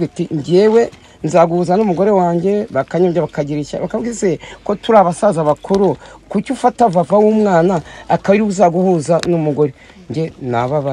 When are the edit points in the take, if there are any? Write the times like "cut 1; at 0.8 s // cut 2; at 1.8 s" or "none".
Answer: none